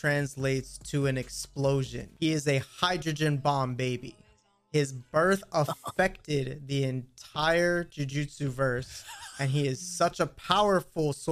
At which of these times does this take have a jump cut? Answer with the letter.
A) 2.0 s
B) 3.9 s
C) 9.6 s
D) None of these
A